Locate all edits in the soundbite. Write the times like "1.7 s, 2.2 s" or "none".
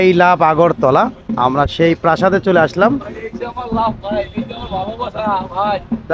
none

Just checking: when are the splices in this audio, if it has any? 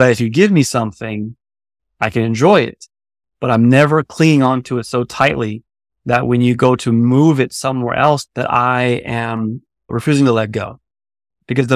8.3 s

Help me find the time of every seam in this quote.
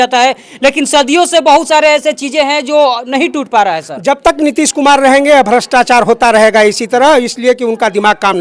none

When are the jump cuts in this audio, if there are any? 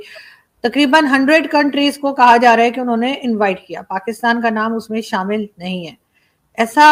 none

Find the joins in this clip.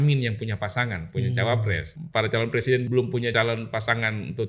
1.9 s, 3.0 s

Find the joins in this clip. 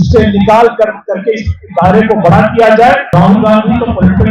3.1 s

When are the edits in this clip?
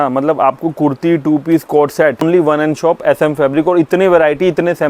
2.2 s

